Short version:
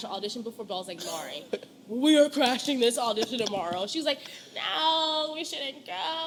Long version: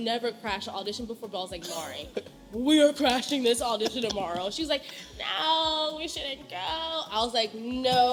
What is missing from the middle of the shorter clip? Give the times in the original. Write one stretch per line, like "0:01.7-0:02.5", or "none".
none